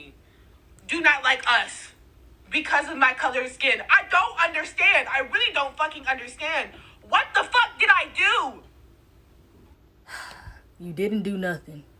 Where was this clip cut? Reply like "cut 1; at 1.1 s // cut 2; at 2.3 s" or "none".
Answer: cut 1; at 6.0 s